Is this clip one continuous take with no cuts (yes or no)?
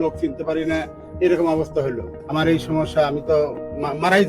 no